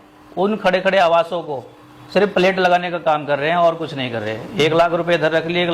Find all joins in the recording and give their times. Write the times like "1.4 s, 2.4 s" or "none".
none